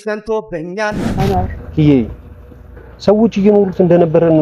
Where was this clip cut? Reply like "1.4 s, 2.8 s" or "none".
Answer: 1.0 s